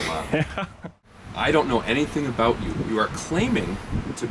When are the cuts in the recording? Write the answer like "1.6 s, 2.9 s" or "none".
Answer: 1.2 s